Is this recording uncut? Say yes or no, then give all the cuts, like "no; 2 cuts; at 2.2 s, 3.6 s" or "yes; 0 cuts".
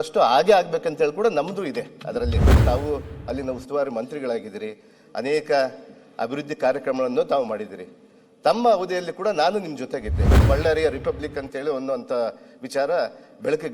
no; 2 cuts; at 2.6 s, 10.5 s